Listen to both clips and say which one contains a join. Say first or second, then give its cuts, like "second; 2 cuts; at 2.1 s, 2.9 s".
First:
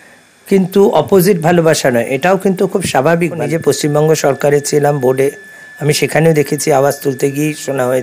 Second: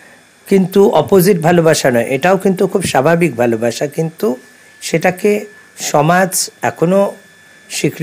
first; 1 cut; at 3.5 s